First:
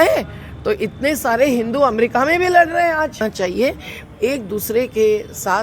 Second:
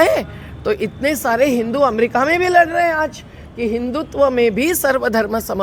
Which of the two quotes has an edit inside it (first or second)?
first